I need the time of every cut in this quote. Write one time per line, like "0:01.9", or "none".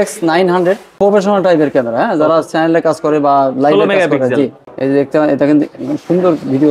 0:00.9
0:04.7